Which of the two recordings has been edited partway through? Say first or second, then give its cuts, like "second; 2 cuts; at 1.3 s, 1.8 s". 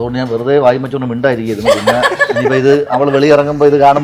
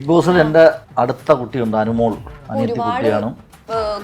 second; 2 cuts; at 0.8 s, 2.3 s